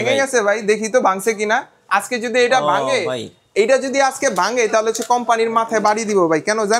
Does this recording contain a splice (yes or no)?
no